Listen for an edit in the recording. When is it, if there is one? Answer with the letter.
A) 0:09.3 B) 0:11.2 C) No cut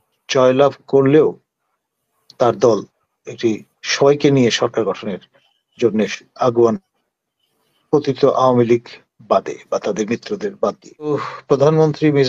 B